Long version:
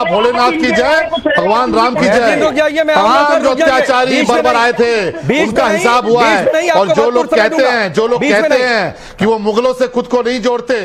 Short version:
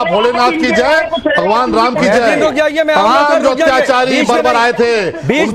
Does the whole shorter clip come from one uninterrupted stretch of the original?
yes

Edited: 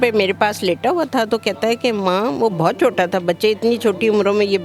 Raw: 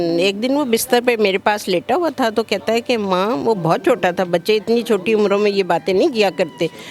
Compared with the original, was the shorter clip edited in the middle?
no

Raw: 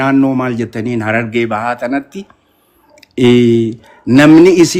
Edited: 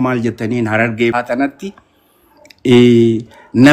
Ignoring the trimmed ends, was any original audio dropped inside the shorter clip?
yes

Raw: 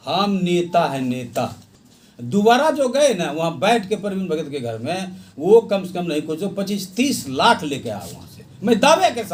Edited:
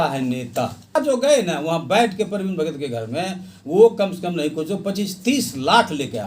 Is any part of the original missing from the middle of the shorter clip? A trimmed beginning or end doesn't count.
yes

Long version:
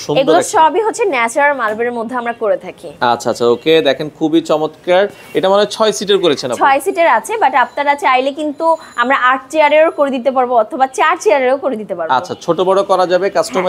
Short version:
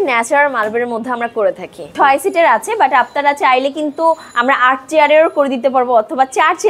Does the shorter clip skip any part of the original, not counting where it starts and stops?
yes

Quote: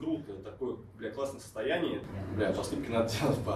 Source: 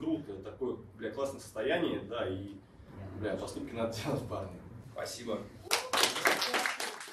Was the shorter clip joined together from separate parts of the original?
yes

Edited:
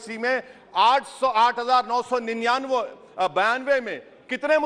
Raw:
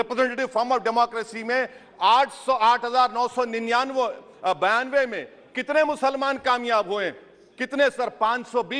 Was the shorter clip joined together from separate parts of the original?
no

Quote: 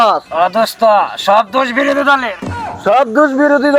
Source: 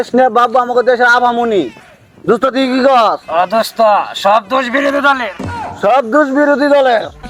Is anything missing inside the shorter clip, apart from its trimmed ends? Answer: no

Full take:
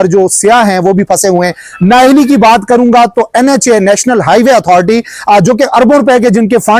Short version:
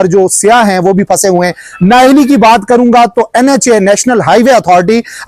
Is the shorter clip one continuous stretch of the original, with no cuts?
yes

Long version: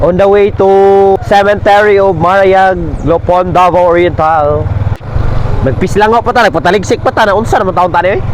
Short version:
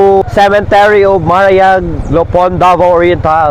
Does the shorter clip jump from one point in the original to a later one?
no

